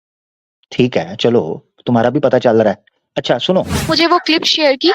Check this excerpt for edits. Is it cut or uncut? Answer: cut